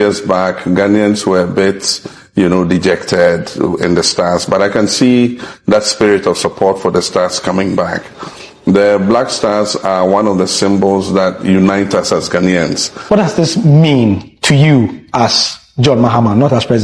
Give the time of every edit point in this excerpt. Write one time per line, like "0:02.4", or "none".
0:13.0

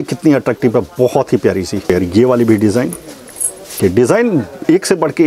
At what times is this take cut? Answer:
0:01.8
0:03.7

